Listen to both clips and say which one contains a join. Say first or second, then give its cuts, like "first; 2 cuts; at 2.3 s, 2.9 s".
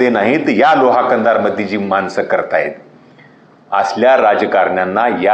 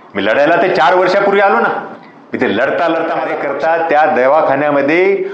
second; 1 cut; at 3.3 s